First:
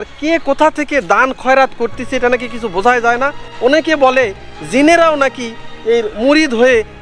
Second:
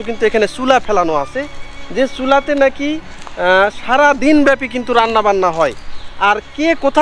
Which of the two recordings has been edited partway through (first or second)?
first